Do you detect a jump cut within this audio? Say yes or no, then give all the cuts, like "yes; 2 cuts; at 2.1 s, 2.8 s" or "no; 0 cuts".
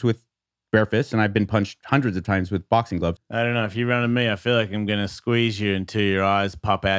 yes; 1 cut; at 3.2 s